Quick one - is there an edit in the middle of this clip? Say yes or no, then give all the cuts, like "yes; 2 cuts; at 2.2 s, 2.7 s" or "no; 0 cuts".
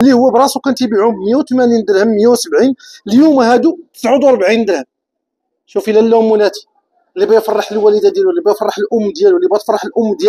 no; 0 cuts